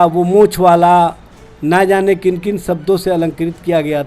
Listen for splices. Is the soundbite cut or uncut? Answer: uncut